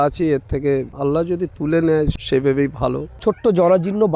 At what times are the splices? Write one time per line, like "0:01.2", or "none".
0:02.1
0:03.1

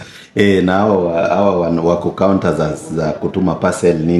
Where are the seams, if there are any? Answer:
none

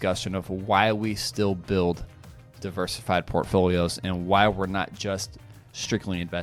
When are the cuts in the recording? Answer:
none

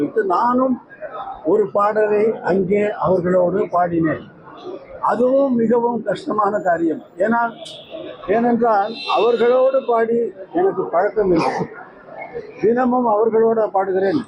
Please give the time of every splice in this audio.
none

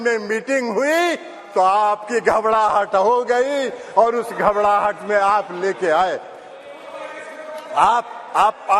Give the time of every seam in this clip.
none

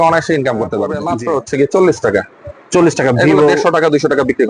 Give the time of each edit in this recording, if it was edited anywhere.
0:01.1

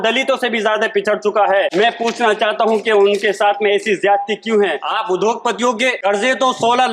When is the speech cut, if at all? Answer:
0:01.7
0:04.9
0:06.0

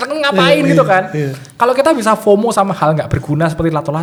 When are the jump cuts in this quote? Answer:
none

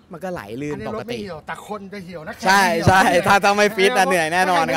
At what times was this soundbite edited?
none

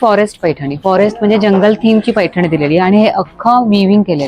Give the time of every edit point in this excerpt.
none

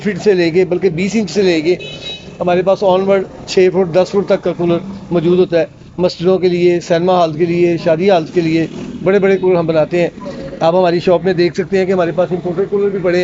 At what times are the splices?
none

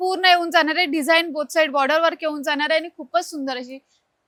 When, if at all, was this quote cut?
none

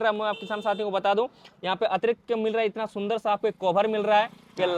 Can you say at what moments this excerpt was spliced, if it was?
none

